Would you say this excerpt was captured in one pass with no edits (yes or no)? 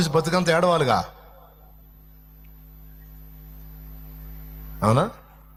yes